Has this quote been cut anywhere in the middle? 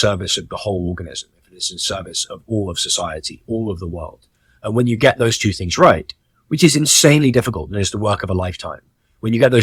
no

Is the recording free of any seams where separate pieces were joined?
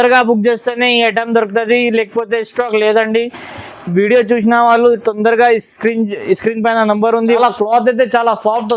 no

